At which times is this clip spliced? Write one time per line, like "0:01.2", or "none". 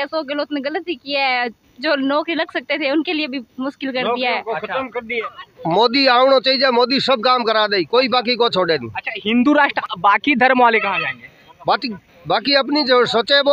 0:05.2
0:09.8